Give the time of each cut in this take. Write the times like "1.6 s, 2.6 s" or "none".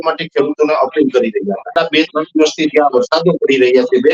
1.6 s